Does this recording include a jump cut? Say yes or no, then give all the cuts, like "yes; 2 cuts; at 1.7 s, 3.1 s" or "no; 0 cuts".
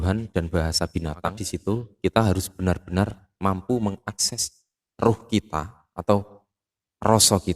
yes; 1 cut; at 1.5 s